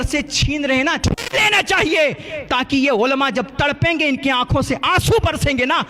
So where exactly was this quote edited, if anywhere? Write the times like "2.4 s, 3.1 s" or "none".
1.0 s